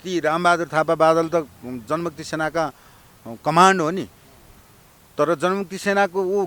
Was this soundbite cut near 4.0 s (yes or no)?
no